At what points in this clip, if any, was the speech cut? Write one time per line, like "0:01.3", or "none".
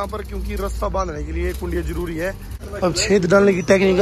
0:02.6